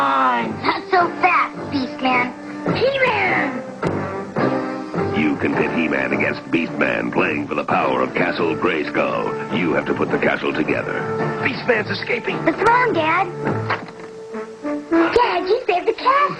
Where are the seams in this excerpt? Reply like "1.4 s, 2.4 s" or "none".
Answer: none

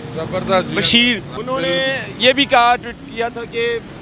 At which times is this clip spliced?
1.3 s

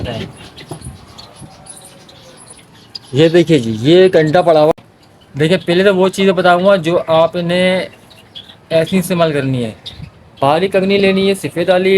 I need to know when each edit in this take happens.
4.8 s

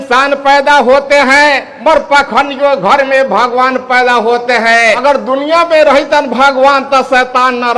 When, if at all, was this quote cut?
1.7 s, 5.0 s

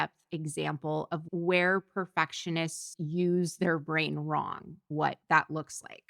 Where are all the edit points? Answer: 1.2 s, 4.8 s

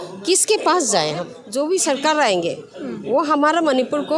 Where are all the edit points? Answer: 1.4 s

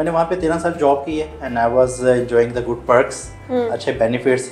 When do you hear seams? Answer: none

